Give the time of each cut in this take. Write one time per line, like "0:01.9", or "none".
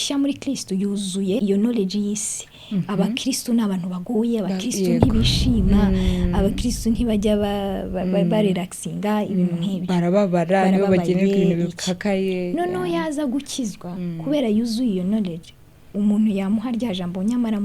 0:01.4